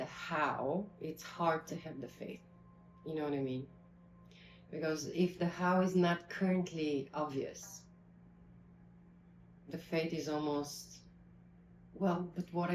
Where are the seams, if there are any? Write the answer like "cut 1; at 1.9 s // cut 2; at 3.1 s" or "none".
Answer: none